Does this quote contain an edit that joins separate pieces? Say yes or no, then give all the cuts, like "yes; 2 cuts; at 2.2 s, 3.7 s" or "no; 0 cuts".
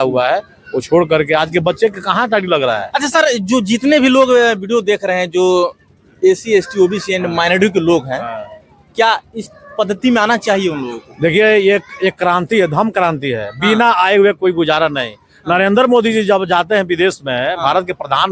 no; 0 cuts